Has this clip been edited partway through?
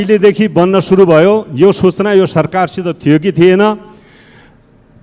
no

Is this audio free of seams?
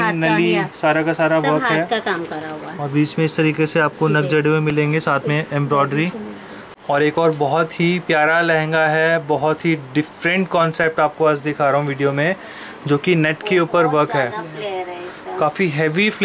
no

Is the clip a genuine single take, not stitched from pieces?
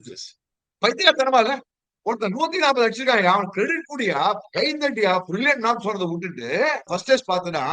no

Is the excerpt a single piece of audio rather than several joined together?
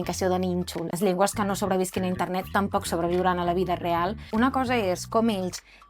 no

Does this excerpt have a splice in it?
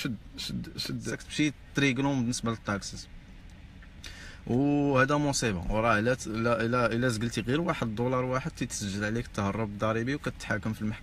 yes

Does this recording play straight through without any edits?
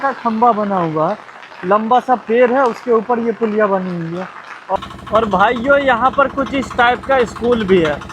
no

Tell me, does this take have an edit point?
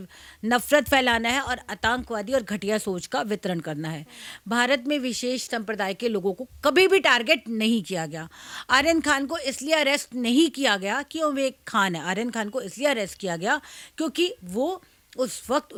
no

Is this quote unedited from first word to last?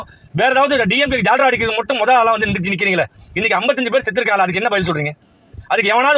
yes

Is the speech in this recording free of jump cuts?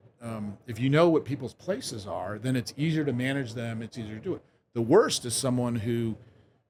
yes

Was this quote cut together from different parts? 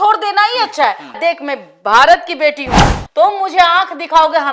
yes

